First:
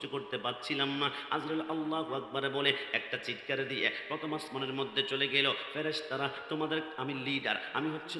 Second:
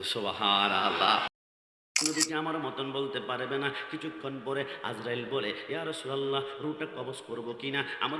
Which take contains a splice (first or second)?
second